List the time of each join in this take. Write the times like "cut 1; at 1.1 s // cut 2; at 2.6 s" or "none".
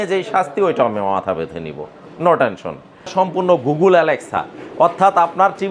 cut 1; at 3.1 s